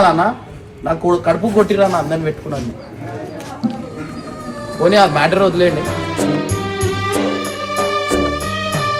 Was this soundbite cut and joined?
no; 0 cuts

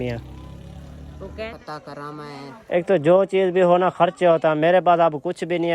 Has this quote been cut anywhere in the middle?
yes; 1 cut; at 1.6 s

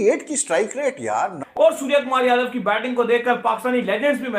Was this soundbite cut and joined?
yes; 1 cut; at 1.4 s

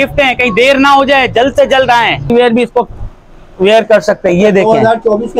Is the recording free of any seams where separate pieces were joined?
no; 1 cut; at 2.2 s

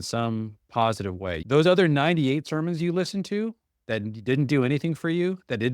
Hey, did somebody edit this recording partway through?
yes; 1 cut; at 1.4 s

